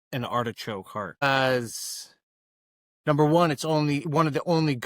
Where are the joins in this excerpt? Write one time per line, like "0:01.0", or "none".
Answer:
0:01.2